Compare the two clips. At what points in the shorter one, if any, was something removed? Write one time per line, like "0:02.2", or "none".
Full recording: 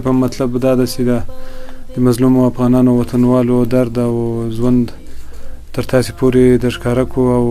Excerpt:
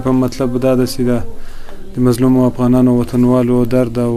none